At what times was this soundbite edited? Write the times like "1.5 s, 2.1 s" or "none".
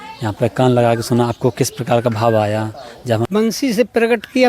3.2 s